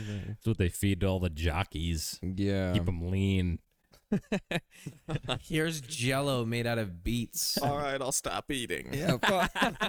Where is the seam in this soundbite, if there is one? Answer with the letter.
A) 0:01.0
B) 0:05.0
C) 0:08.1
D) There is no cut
D